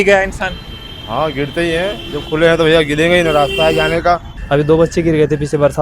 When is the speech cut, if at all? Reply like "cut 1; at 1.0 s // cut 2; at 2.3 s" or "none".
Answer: cut 1; at 4.3 s